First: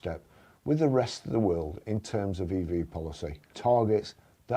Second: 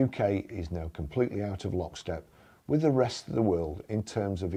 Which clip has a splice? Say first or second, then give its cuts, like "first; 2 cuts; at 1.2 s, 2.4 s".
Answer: first; 1 cut; at 3.4 s